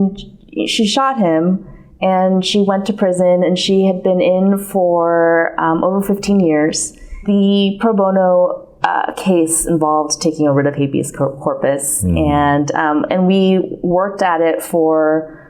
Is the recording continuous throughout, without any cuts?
no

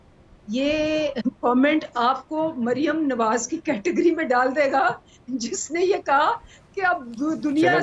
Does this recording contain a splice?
no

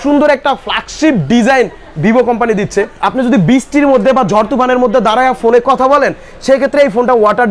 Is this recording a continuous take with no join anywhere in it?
no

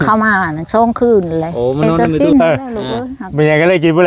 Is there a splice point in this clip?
yes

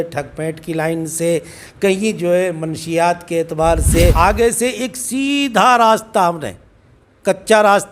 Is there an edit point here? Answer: yes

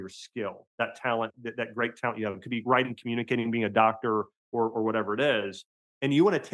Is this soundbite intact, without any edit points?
yes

